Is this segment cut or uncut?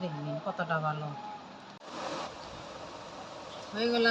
cut